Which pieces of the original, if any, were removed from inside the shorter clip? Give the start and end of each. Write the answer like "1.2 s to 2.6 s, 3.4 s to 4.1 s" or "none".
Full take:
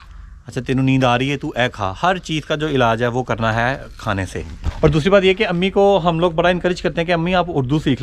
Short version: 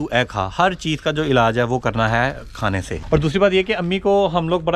4.4 s to 4.7 s